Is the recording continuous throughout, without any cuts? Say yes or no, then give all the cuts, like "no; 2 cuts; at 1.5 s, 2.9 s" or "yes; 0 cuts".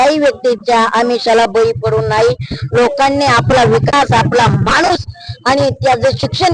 yes; 0 cuts